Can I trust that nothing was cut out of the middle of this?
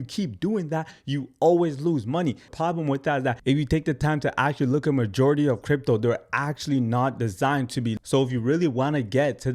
no; 2 cuts; at 2.5 s, 8.0 s

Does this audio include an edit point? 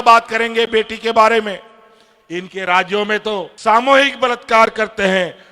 yes; 1 cut; at 3.5 s

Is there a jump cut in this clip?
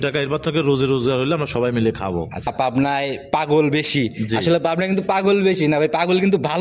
yes; 1 cut; at 2.5 s

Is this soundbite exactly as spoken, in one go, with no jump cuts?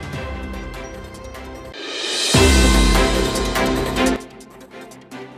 no; 2 cuts; at 1.7 s, 4.2 s

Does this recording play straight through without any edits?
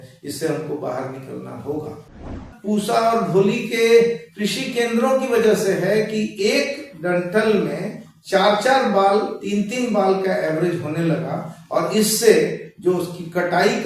no; 1 cut; at 2.4 s

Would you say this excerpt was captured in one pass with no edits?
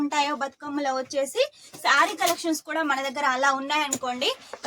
yes; 0 cuts

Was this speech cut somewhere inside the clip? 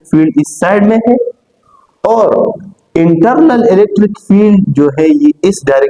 no; 0 cuts

